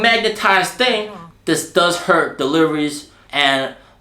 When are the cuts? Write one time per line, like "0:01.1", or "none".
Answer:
0:01.2